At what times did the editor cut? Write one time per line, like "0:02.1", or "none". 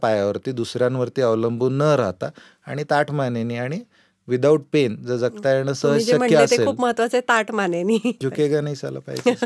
0:08.2

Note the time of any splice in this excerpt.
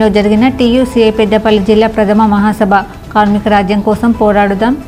none

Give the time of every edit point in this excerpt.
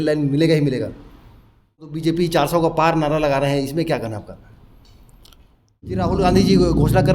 0:01.9
0:06.0

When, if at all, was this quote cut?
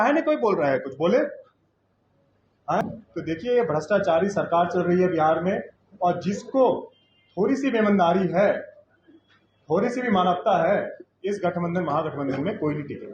0:02.8

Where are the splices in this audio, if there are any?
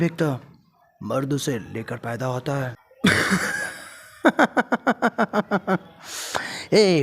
0:02.8

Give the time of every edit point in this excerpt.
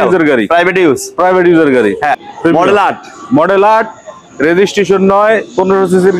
0:02.3

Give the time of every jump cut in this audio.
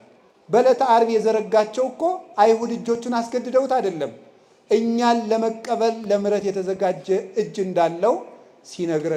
none

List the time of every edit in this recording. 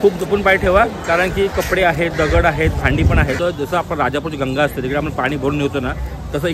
0:03.4

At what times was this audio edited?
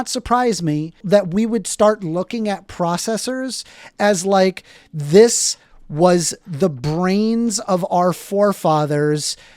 0:01.0

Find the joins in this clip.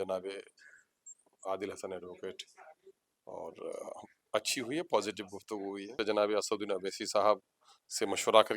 0:05.9

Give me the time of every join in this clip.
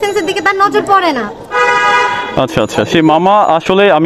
none

